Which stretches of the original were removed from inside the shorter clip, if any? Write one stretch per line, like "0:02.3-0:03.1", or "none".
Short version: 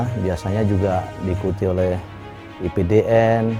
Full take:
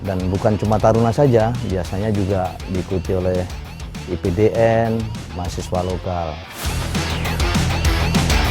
none